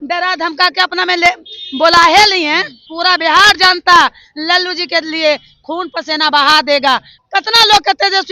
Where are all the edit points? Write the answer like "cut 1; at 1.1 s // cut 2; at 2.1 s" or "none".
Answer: cut 1; at 2.9 s // cut 2; at 7.1 s